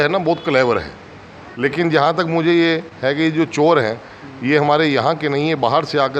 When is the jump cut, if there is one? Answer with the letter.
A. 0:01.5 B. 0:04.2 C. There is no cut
A